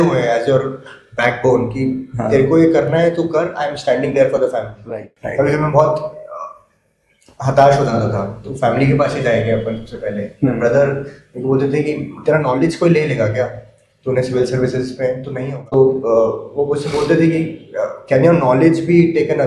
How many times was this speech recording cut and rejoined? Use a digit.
2